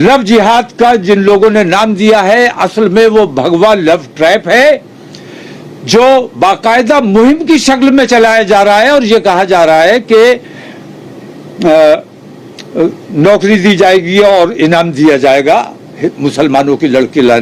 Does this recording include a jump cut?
no; 0 cuts

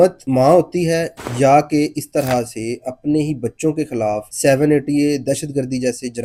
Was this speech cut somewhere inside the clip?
no; 0 cuts

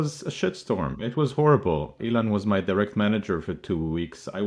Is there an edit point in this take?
yes; 1 cut; at 1.9 s

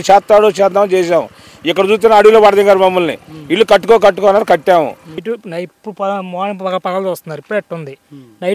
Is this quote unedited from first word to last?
no; 1 cut; at 5.1 s

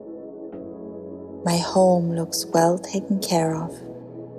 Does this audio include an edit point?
yes; 2 cuts; at 1.4 s, 3.7 s

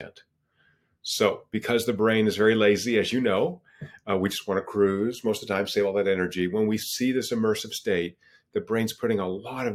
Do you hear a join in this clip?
no; 0 cuts

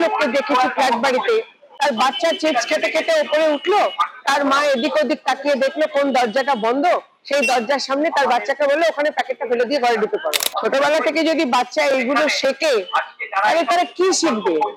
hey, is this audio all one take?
yes; 0 cuts

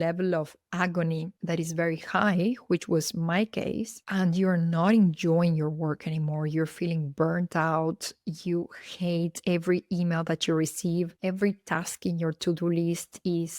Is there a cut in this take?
no; 0 cuts

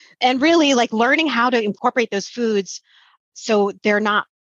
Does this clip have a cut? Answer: yes; 1 cut; at 1.8 s

